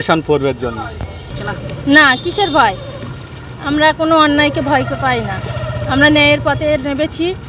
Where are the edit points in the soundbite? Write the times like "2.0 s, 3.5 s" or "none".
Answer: 1.3 s